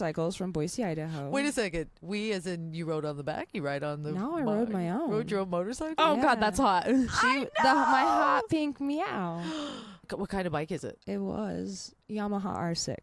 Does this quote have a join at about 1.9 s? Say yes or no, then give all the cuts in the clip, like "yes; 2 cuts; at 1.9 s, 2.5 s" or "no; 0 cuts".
no; 2 cuts; at 10.1 s, 12.0 s